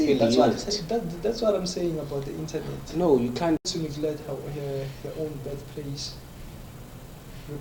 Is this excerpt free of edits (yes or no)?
no